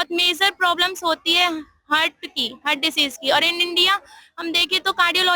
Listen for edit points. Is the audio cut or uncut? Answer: uncut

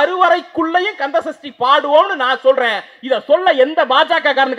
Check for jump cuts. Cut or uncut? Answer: uncut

